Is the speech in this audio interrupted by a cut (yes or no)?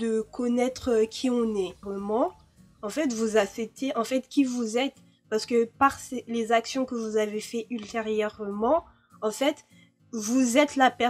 yes